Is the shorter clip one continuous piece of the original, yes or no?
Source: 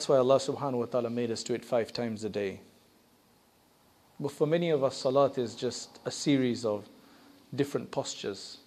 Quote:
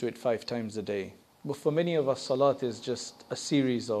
no